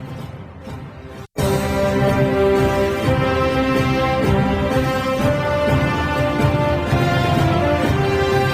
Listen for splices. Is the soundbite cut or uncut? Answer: cut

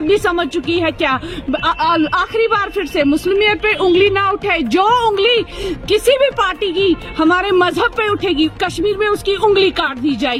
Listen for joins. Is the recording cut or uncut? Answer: uncut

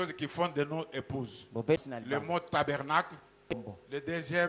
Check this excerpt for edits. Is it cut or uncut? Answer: cut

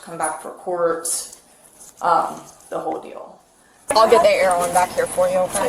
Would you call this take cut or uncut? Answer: cut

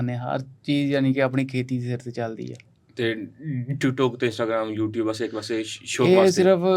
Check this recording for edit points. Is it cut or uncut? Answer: uncut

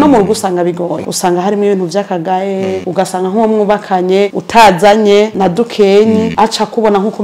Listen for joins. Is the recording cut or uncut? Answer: cut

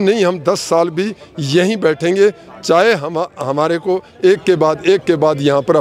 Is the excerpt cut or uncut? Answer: uncut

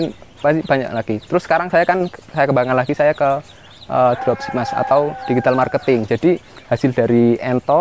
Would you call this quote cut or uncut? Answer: uncut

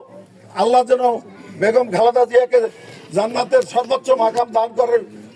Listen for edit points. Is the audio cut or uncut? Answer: uncut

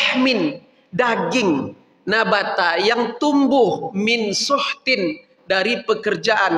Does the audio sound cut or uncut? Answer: uncut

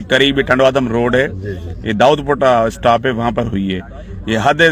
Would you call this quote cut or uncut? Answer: uncut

